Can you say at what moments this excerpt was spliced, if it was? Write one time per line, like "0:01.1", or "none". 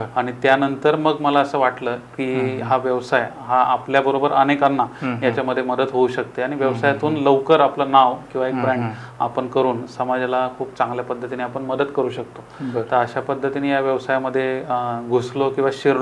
none

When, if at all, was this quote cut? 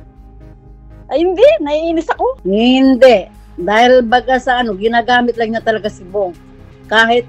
0:02.4

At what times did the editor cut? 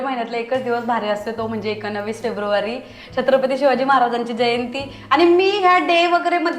none

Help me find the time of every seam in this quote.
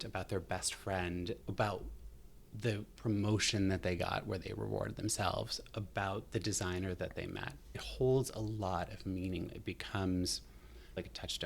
0:01.4
0:07.8
0:09.6

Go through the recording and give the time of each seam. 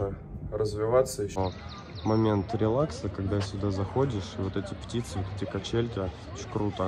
0:01.4

